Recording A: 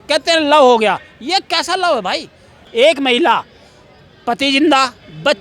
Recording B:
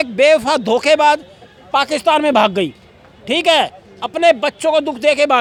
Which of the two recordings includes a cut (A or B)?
A